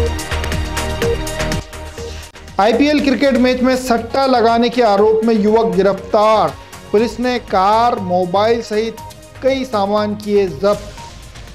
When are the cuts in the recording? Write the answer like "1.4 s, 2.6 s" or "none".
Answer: 1.5 s